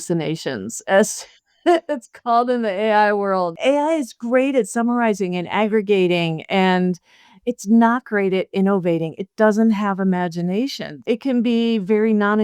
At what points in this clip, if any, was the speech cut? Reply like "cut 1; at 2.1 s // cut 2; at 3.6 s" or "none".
cut 1; at 3.5 s // cut 2; at 11.0 s